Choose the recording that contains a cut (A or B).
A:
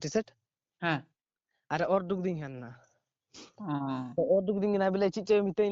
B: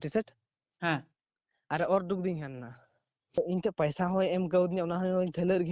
B